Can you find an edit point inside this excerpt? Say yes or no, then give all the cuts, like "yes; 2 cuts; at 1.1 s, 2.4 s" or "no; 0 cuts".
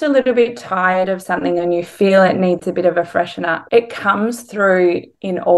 no; 0 cuts